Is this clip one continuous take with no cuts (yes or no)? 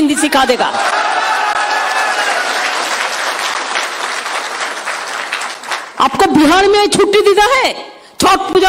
yes